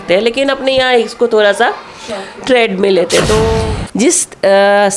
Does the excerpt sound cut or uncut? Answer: cut